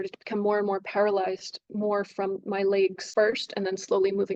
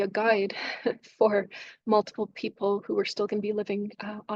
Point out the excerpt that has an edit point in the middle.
first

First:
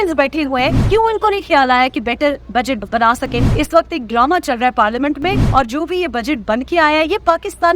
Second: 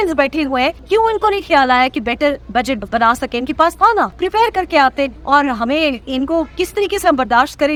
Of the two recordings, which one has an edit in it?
first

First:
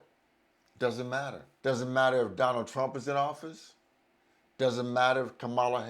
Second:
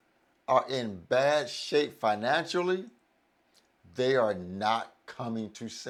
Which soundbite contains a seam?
first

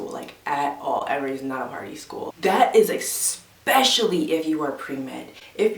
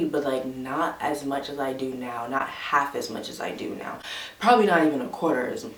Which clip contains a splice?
first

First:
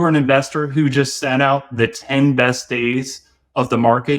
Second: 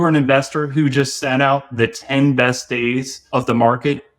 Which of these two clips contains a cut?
second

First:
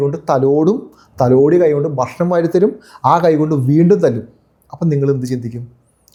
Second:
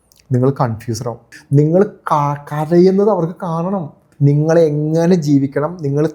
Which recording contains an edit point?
second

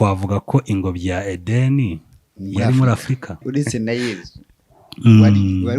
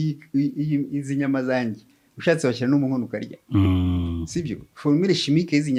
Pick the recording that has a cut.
first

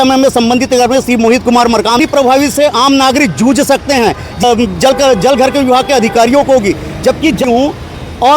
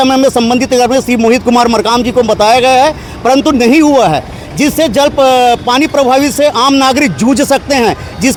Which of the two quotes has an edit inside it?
first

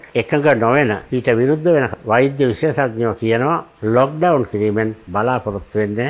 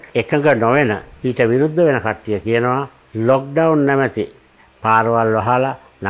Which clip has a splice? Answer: first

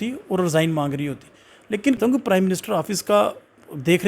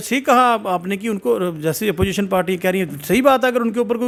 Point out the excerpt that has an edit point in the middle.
first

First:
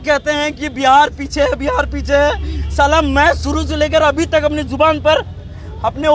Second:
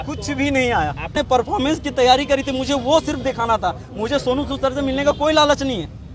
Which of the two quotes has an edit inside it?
second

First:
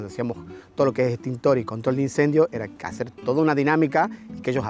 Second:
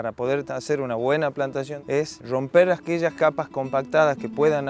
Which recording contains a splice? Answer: second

